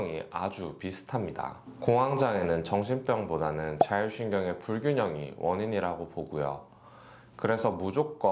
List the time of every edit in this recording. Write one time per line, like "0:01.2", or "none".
0:01.6